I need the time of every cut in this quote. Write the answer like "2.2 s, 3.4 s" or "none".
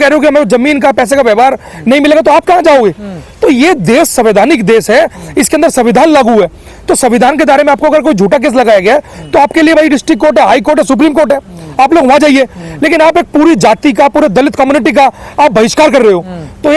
none